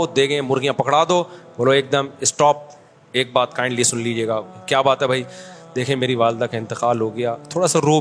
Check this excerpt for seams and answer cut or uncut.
uncut